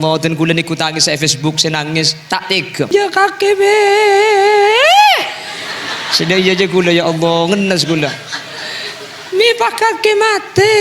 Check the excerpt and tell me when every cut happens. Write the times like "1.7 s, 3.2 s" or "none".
2.9 s